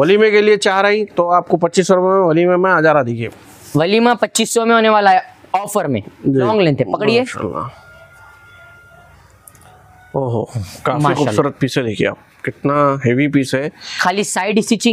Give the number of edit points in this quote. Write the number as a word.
one